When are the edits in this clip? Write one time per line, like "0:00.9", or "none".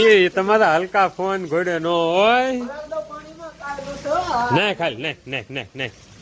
none